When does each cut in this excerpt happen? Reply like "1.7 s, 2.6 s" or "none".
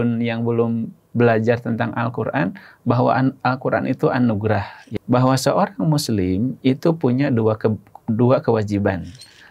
4.8 s